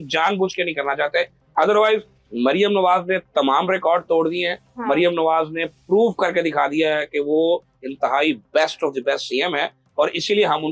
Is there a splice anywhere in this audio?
no; 0 cuts

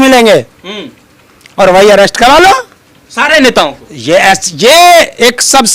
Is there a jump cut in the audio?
no; 0 cuts

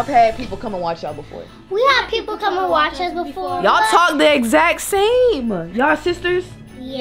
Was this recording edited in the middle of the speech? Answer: no; 0 cuts

